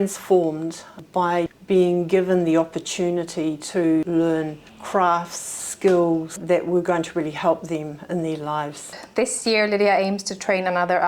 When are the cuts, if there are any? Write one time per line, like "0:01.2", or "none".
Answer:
0:01.5
0:05.5
0:08.9